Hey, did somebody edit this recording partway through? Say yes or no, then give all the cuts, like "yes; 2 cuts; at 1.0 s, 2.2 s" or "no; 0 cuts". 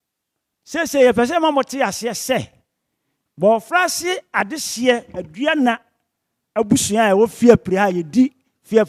no; 0 cuts